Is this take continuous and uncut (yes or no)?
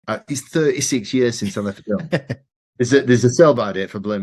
yes